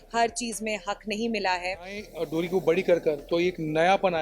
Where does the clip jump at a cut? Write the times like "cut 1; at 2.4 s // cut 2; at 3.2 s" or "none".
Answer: cut 1; at 2.1 s